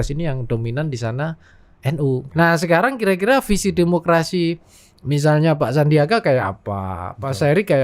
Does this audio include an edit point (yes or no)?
yes